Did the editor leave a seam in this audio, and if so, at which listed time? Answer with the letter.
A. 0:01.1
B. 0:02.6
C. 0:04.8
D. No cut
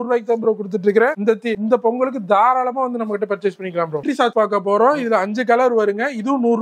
D